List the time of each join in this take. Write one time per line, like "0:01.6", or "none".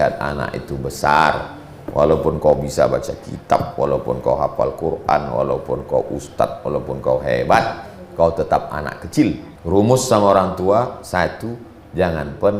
0:09.5